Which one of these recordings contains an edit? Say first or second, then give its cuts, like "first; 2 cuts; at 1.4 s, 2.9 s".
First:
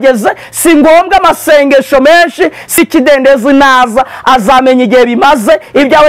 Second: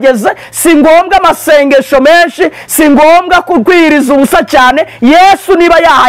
first; 1 cut; at 2.8 s